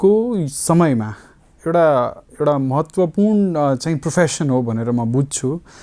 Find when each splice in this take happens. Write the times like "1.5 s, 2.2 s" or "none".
none